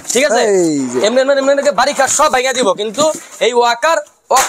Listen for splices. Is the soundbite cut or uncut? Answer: uncut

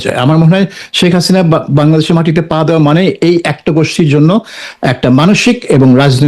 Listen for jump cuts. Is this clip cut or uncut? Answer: uncut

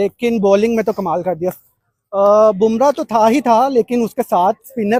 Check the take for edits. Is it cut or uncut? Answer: uncut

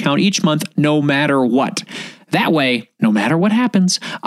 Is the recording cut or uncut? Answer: cut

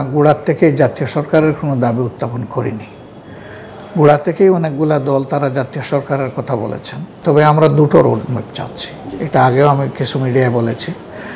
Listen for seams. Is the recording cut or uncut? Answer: cut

